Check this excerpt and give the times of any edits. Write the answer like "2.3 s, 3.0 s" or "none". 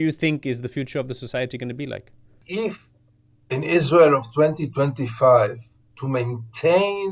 2.4 s

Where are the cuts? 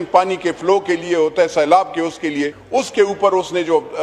2.6 s

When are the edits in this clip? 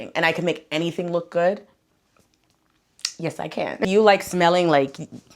3.8 s

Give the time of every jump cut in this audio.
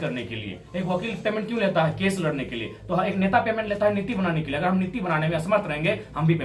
none

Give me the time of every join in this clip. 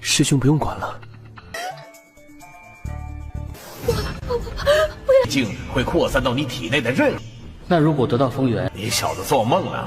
5.3 s

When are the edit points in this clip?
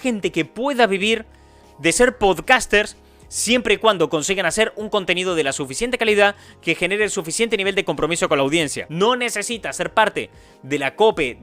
8.8 s

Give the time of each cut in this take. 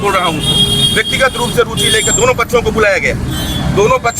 none

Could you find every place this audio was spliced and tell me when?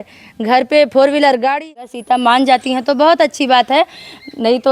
1.8 s

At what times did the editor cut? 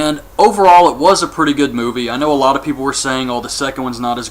2.2 s

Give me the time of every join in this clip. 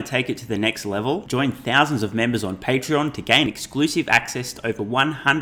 none

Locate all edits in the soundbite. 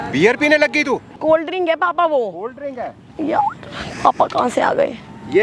1.1 s

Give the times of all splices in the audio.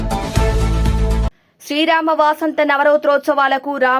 1.5 s

